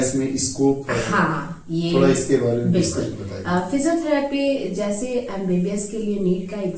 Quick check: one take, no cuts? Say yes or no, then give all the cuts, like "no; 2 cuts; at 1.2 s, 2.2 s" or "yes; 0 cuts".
yes; 0 cuts